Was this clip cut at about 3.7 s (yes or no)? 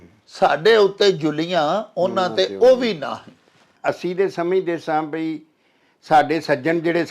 yes